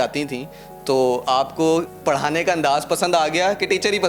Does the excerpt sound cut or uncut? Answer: cut